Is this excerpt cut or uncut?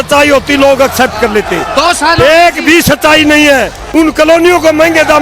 cut